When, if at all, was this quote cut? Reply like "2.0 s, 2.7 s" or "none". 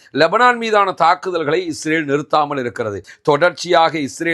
3.1 s